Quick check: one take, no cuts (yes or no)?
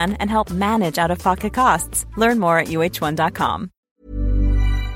no